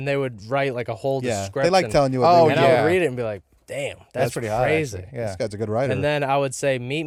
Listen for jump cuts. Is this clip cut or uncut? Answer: uncut